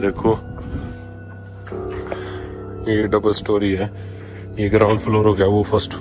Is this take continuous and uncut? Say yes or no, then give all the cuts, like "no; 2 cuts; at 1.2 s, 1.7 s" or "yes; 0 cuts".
yes; 0 cuts